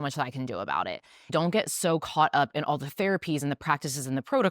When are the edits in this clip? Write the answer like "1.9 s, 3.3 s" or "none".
1.3 s